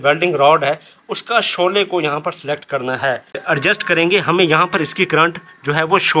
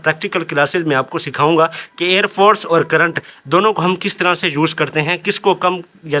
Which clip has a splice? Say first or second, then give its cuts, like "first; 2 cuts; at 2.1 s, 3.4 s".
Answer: first; 1 cut; at 3.4 s